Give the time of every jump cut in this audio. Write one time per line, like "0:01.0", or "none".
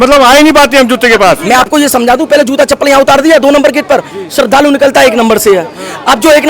0:01.4